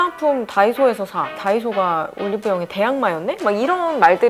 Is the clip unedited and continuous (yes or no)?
yes